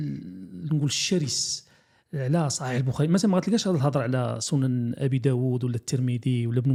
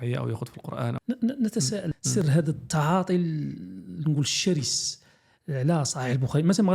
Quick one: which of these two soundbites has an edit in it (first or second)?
second